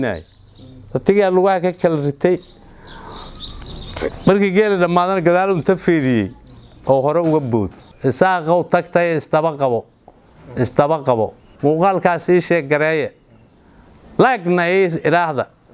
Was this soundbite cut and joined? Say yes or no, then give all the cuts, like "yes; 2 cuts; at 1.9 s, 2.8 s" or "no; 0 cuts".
yes; 1 cut; at 7.9 s